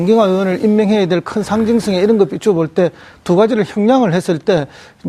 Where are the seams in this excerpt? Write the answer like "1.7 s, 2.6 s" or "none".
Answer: none